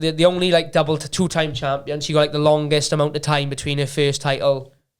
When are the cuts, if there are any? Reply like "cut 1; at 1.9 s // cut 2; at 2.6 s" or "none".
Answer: none